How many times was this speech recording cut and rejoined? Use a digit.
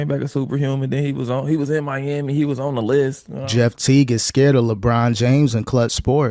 1